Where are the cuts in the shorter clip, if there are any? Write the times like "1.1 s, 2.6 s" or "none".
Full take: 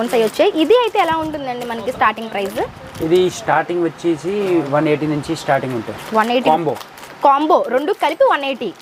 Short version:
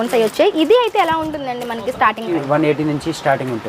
2.3 s

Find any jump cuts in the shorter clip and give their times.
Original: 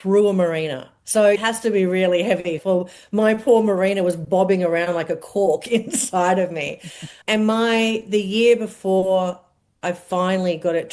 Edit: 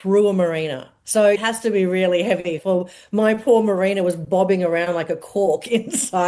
none

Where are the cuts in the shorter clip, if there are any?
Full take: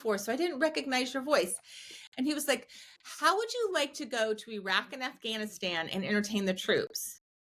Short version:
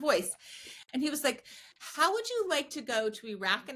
none

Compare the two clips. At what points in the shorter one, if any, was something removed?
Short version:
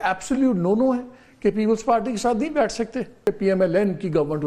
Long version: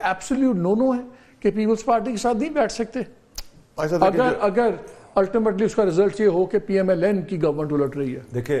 3.2 s

